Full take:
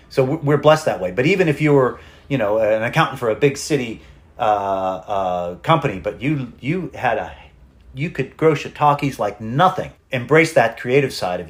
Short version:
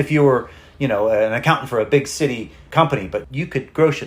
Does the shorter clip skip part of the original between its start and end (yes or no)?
yes